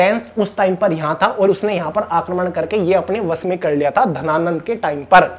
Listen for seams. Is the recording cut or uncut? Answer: uncut